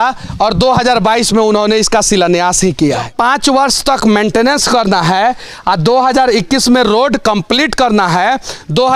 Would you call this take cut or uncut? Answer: cut